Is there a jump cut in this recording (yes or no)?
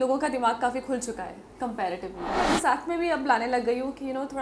yes